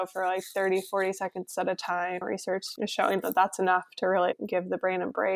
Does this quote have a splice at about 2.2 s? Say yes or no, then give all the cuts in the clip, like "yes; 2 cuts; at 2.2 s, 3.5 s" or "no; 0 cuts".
yes; 2 cuts; at 2.2 s, 4.3 s